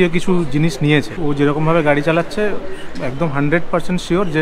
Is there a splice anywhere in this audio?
no; 0 cuts

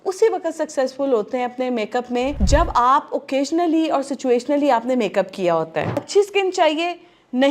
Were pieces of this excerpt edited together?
yes; 2 cuts; at 2.4 s, 6.1 s

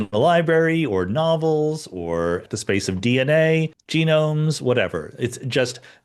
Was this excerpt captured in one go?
no; 2 cuts; at 2.4 s, 3.8 s

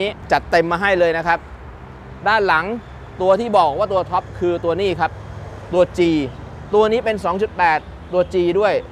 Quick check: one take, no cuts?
yes; 0 cuts

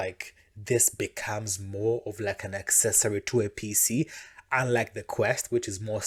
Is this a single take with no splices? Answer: yes; 0 cuts

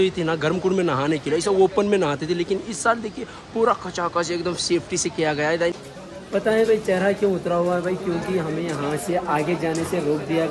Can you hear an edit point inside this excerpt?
yes; 1 cut; at 5.8 s

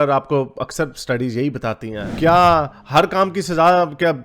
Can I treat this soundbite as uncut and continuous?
no; 1 cut; at 2.0 s

